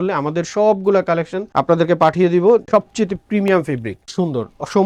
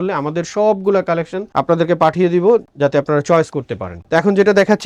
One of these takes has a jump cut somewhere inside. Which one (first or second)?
first